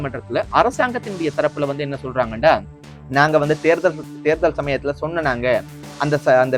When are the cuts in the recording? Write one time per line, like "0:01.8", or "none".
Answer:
none